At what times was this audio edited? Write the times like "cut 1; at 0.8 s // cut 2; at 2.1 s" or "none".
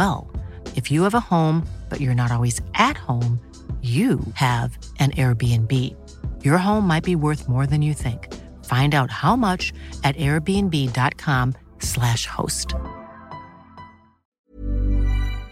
cut 1; at 14.4 s